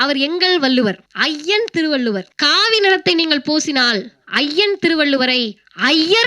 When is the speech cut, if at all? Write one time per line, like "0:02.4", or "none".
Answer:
0:01.1
0:02.3